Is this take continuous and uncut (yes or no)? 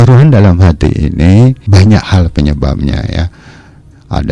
no